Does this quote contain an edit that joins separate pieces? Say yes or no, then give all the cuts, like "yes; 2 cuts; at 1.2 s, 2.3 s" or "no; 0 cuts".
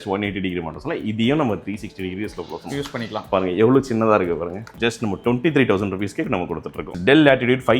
yes; 2 cuts; at 4.7 s, 6.9 s